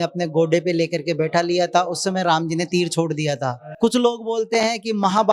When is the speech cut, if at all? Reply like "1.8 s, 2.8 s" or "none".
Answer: 3.6 s